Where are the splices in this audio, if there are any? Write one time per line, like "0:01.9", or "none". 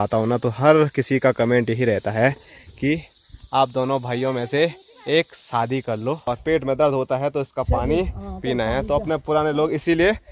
0:06.2